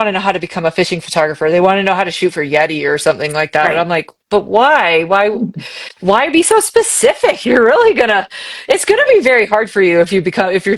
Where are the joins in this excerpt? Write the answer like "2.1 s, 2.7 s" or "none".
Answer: none